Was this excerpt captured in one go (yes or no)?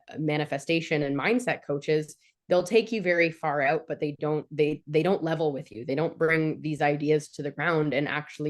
yes